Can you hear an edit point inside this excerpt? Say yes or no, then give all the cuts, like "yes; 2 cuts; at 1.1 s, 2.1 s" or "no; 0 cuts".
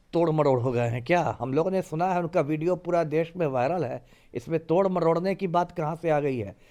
no; 0 cuts